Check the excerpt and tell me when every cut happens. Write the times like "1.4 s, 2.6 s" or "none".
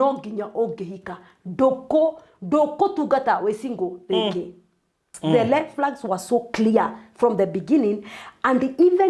5.1 s